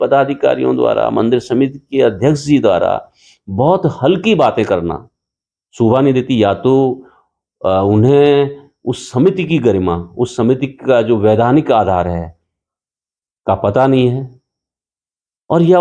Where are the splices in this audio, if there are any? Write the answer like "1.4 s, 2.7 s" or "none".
none